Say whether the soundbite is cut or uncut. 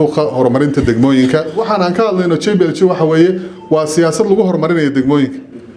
cut